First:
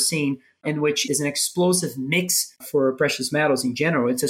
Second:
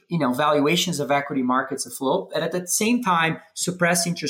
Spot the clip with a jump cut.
first; 2 cuts; at 1.0 s, 2.6 s

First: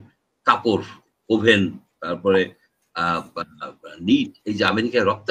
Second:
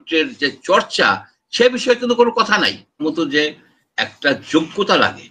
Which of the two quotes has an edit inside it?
second; 1 cut; at 3.0 s

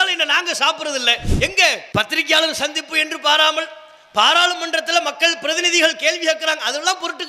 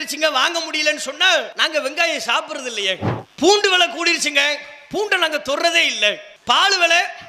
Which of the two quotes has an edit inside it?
second; 1 cut; at 1.6 s

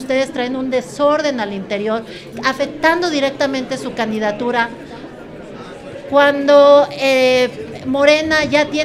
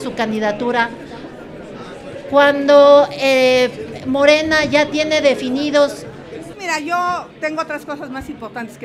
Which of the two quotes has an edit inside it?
second; 1 cut; at 6.5 s

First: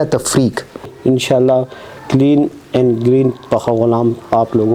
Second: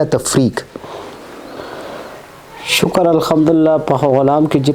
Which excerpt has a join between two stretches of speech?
first; 1 cut; at 0.9 s

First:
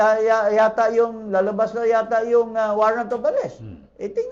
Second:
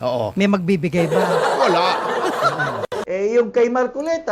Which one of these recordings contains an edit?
second; 1 cut; at 3.0 s

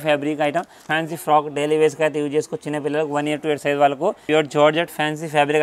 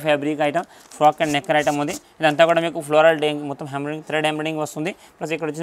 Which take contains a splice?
first; 2 cuts; at 0.8 s, 4.2 s

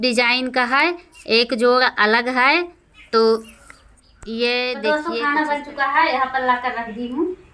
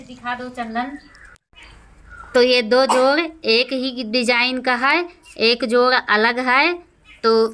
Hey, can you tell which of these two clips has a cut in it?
first; 1 cut; at 4.9 s

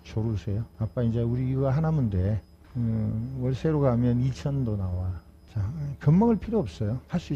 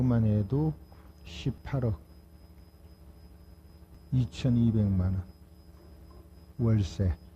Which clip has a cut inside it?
second; 1 cut; at 4.0 s

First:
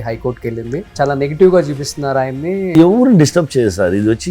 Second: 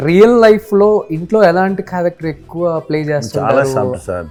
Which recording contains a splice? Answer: first; 2 cuts; at 0.9 s, 2.7 s

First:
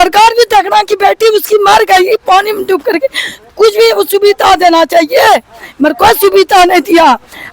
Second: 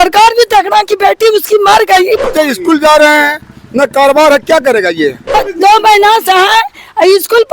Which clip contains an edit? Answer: second; 2 cuts; at 2.3 s, 5.4 s

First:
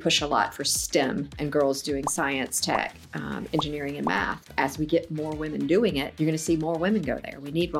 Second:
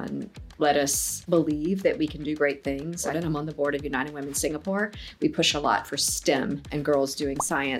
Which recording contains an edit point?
second; 1 cut; at 3.1 s

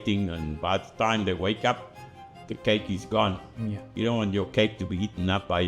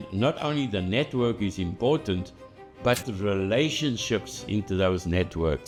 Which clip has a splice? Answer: first; 1 cut; at 3.8 s

